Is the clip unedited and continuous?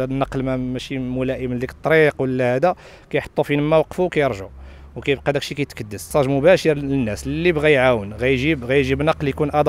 no; 1 cut; at 6.1 s

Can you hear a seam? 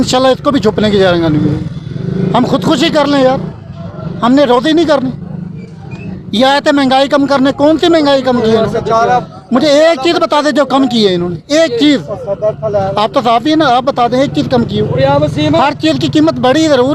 no; 0 cuts

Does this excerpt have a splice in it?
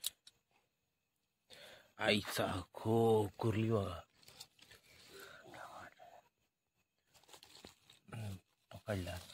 no; 0 cuts

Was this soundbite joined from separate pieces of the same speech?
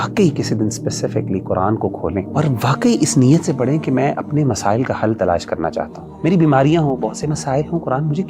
yes; 2 cuts; at 2.3 s, 6.0 s

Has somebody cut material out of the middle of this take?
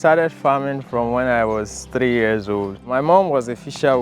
yes; 1 cut; at 2.9 s

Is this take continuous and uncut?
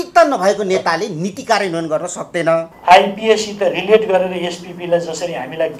no; 1 cut; at 2.7 s

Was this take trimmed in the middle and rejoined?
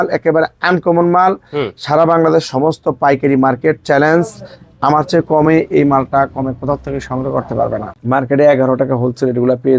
yes; 1 cut; at 7.9 s

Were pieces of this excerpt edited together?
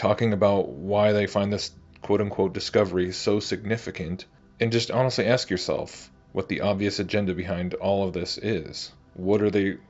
no; 0 cuts

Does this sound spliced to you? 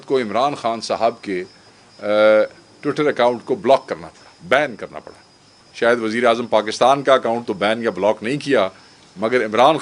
yes; 1 cut; at 5.6 s

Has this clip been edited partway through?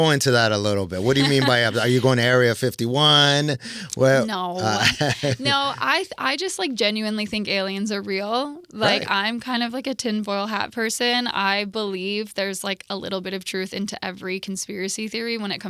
no; 0 cuts

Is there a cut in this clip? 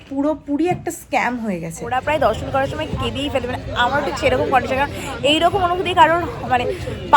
yes; 1 cut; at 1.9 s

